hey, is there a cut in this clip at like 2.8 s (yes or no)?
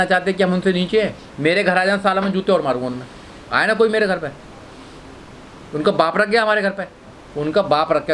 no